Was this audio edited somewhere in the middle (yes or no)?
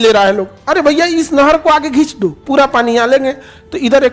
yes